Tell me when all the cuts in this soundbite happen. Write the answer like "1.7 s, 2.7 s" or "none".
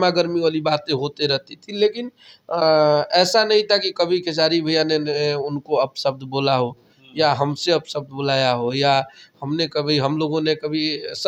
none